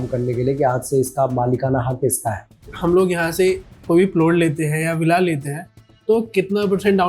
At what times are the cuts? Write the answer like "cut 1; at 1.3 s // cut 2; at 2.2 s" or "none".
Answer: cut 1; at 2.7 s